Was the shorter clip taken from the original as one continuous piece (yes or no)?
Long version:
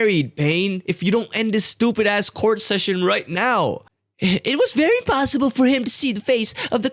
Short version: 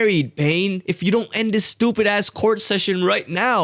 yes